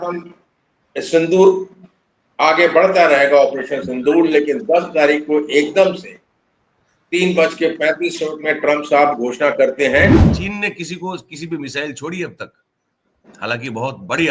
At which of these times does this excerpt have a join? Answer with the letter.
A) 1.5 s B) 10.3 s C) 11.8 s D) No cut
B